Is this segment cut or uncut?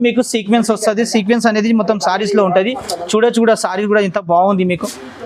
uncut